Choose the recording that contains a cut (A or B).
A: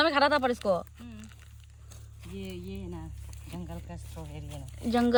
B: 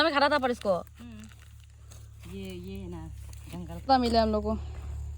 B